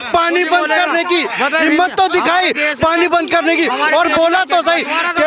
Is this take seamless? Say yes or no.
yes